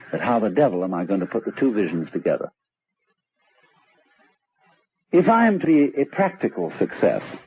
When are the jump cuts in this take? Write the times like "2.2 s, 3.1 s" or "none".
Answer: 5.6 s